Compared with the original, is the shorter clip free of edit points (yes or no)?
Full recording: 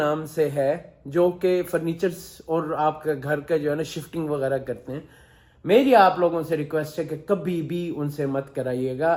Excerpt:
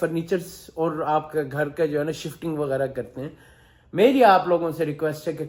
yes